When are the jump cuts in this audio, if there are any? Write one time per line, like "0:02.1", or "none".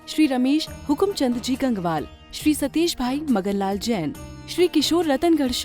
none

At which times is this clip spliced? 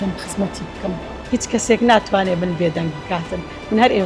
0:01.2

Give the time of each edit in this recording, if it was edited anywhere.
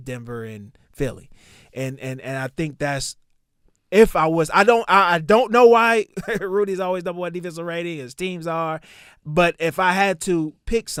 none

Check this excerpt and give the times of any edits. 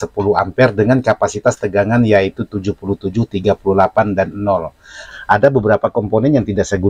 0:05.0

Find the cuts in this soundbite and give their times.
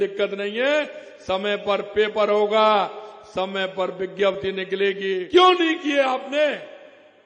0:05.2

